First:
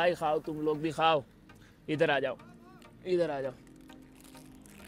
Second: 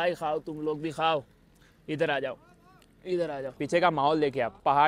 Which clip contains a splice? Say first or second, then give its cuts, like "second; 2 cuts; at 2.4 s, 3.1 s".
second; 1 cut; at 3.6 s